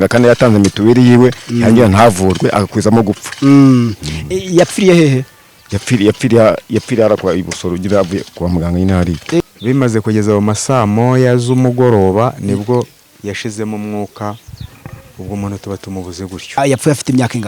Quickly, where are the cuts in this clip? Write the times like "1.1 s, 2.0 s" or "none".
9.4 s, 16.5 s